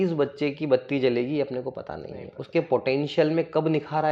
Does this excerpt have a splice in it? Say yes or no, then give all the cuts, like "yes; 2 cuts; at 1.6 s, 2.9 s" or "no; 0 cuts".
no; 0 cuts